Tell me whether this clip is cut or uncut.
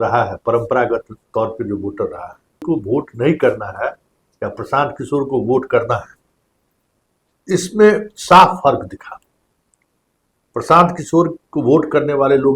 cut